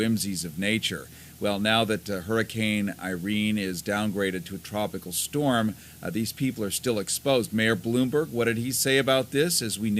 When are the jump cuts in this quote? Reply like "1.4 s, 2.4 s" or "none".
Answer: 8.1 s

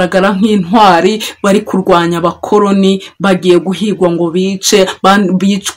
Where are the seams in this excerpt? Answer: none

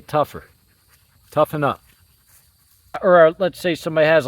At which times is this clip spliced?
3.0 s

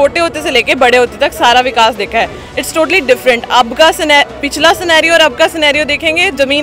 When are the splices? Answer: none

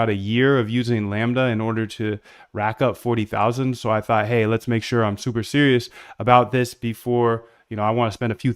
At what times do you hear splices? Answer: 1.3 s

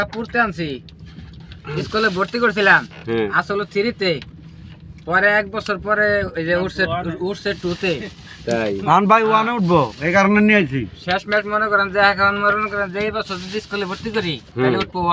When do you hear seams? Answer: none

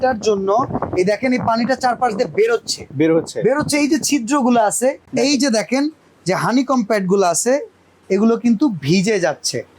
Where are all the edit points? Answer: 5.0 s

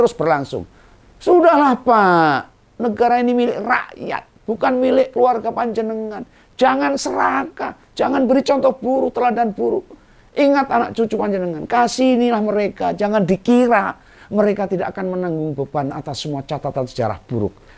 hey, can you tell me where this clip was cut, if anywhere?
none

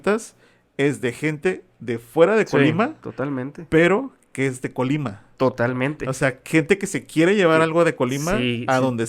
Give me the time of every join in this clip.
none

